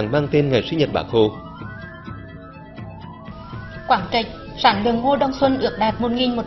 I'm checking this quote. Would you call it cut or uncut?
uncut